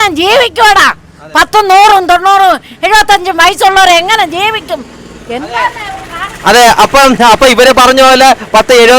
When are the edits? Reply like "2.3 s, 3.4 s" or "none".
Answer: none